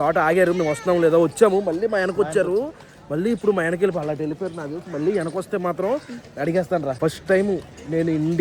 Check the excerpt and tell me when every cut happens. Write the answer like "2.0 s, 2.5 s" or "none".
6.9 s